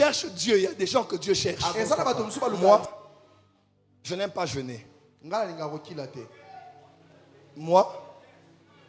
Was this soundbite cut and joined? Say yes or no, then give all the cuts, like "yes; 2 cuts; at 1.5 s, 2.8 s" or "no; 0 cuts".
yes; 2 cuts; at 2.6 s, 7.1 s